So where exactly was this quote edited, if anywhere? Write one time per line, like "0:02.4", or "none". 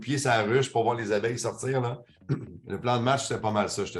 none